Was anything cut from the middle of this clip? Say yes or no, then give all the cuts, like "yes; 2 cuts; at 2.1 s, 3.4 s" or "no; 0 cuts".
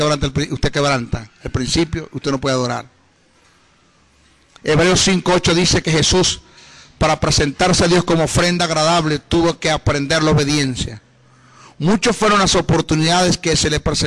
yes; 1 cut; at 13.0 s